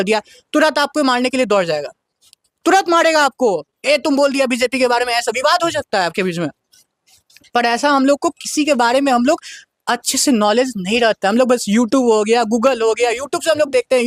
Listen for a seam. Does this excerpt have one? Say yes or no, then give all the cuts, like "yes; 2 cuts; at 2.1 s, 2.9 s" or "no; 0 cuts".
no; 0 cuts